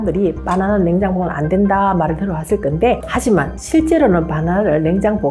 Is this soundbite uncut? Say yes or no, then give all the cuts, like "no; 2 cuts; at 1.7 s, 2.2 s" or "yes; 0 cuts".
yes; 0 cuts